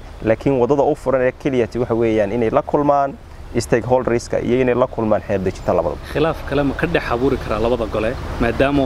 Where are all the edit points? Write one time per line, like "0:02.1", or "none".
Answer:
none